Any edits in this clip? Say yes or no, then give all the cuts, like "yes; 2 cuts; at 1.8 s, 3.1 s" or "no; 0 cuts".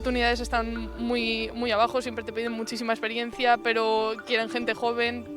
no; 0 cuts